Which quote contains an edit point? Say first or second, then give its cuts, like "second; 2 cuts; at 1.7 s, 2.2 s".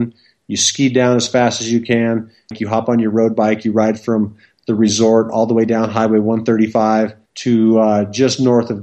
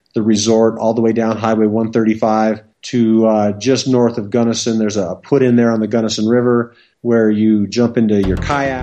first; 1 cut; at 2.6 s